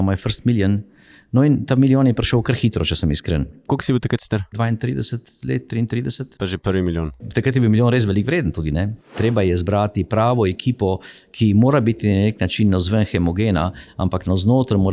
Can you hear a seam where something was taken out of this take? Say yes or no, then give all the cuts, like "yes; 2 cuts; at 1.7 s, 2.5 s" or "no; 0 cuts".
yes; 4 cuts; at 3.6 s, 4.5 s, 7.2 s, 9.1 s